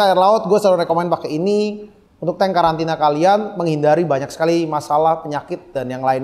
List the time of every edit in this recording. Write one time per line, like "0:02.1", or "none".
none